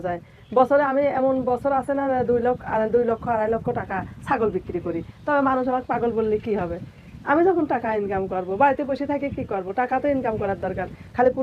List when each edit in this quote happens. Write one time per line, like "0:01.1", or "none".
none